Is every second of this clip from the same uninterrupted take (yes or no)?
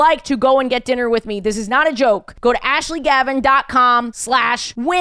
yes